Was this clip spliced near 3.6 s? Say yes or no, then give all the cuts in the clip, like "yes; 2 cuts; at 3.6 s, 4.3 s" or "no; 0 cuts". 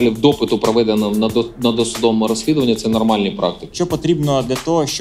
yes; 1 cut; at 3.6 s